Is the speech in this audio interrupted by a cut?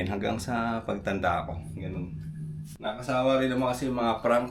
yes; 1 cut; at 2.7 s

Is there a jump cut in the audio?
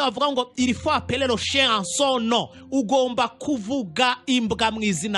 no; 0 cuts

